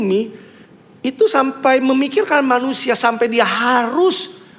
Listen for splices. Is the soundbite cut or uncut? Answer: uncut